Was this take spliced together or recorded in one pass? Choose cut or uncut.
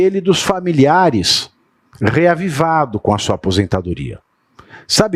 uncut